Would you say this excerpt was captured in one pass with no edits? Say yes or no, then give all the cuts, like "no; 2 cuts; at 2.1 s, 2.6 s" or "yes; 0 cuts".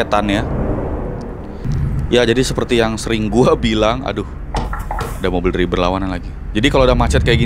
no; 1 cut; at 1.6 s